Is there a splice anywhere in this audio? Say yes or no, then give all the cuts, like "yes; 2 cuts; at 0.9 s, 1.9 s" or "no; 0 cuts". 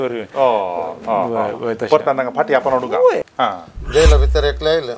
yes; 1 cut; at 3.2 s